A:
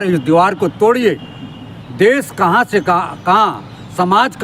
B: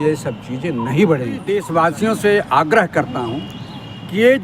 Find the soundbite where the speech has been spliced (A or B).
B